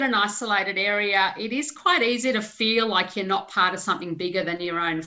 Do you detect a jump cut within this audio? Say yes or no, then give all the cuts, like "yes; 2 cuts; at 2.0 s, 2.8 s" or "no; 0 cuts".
no; 0 cuts